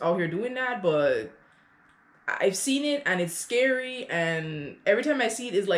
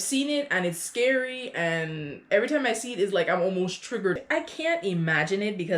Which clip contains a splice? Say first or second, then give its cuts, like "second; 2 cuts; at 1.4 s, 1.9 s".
second; 1 cut; at 4.2 s